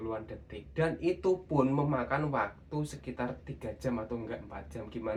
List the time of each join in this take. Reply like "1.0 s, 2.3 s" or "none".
none